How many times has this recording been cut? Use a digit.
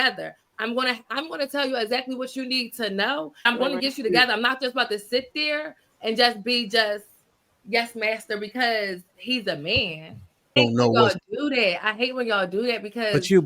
2